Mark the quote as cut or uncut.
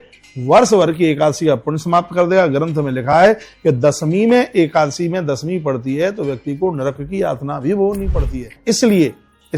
cut